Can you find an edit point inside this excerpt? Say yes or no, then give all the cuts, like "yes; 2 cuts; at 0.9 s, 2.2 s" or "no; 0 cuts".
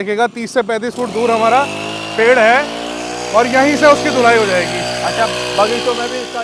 no; 0 cuts